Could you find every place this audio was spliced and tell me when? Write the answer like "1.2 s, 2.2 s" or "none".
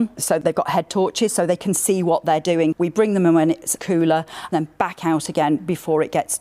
4.5 s